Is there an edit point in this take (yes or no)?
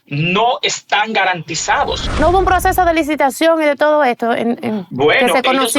yes